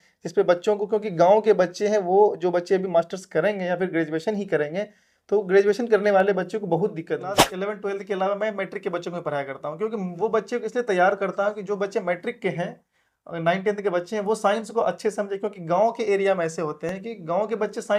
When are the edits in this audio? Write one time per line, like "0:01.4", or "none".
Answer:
0:07.5